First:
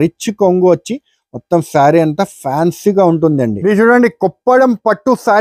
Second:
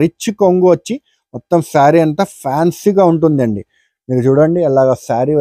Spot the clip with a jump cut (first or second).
first